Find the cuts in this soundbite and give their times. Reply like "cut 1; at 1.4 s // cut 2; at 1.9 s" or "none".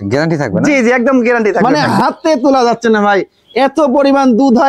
cut 1; at 1.6 s